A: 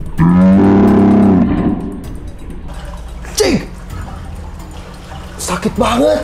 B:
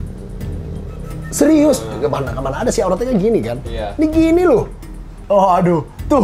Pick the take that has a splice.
B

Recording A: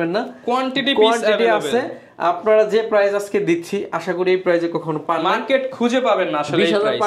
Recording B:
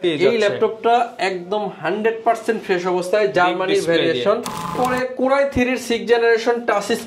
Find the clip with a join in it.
B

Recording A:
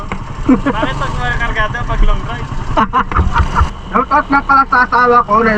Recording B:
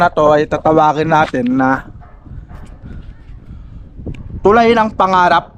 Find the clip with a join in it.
A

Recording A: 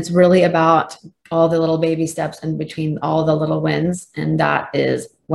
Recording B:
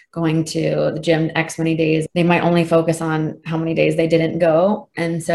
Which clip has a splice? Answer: B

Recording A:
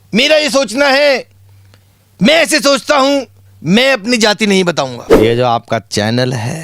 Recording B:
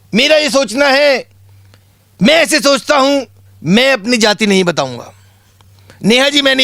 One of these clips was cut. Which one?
A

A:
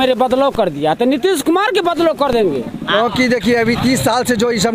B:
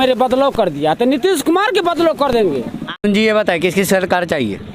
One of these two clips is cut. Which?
A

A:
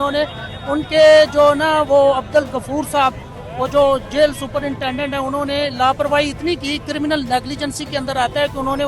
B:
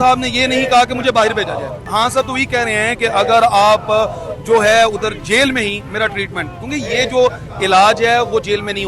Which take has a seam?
B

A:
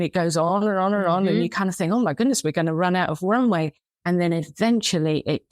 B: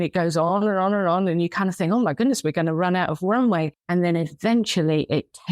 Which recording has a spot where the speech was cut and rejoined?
B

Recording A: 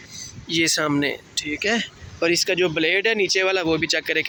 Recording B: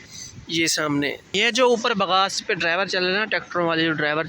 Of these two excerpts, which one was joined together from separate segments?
B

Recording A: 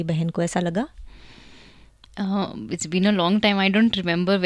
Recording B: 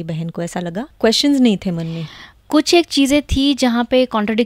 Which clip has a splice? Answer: B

